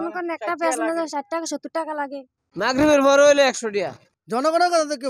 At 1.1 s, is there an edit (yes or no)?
no